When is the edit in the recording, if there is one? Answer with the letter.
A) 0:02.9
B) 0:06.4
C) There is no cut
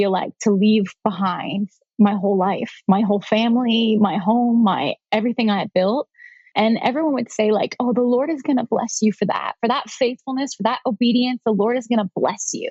B